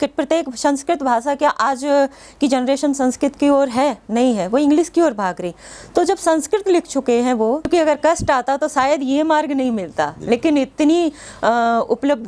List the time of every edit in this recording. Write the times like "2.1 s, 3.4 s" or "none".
7.7 s